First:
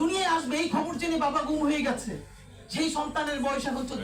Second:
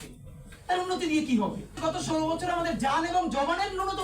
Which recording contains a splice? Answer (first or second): second